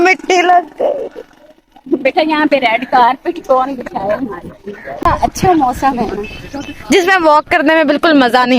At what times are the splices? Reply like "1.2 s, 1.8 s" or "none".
4.9 s